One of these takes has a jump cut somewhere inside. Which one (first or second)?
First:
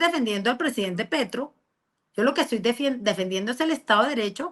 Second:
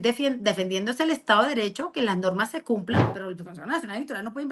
second